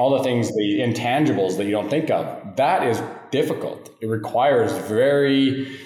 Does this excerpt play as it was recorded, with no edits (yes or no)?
yes